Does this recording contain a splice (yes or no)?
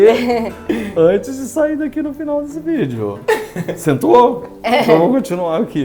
no